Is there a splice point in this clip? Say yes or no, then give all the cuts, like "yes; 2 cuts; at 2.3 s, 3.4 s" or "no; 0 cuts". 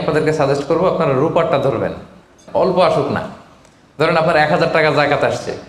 yes; 1 cut; at 2.4 s